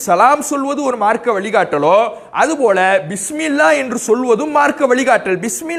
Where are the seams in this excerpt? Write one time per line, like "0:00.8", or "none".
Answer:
none